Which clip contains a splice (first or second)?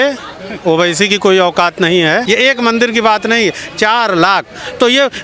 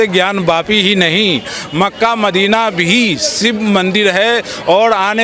first